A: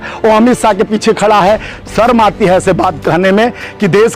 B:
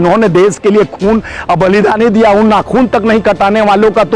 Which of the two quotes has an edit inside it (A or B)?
A